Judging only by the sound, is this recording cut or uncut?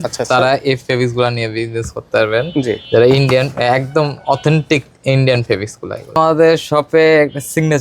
cut